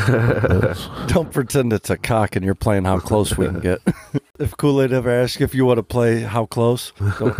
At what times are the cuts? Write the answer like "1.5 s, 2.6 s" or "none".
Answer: 4.4 s